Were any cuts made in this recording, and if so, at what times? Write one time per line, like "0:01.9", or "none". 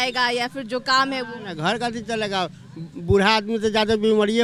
none